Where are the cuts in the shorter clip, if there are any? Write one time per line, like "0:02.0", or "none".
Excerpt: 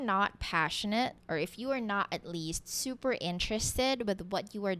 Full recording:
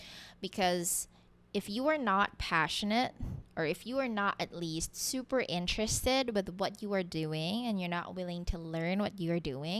0:01.2